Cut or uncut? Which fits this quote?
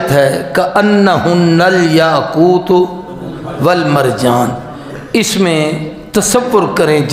uncut